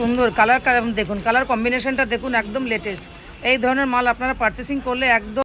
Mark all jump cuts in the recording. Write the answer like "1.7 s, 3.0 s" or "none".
none